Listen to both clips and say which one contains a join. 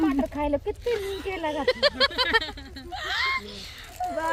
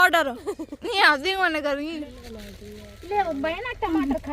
second; 1 cut; at 2.2 s

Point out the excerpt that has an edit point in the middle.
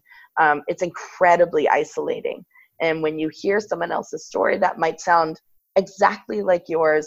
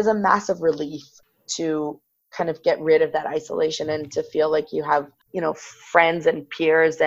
second; 2 cuts; at 1.1 s, 5.2 s

